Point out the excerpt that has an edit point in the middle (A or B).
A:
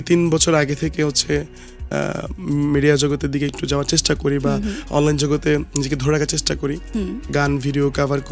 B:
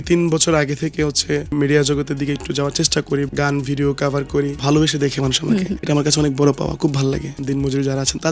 B